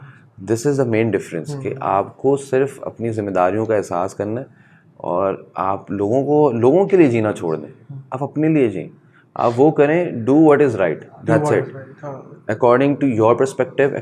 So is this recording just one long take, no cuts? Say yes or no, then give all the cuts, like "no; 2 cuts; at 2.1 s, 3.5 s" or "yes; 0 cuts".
yes; 0 cuts